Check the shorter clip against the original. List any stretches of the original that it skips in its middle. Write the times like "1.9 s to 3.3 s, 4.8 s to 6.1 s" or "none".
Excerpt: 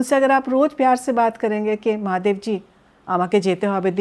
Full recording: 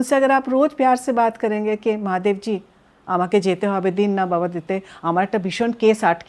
none